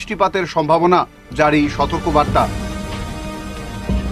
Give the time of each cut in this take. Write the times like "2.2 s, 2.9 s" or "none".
none